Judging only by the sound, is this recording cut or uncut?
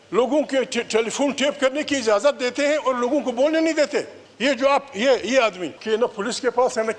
cut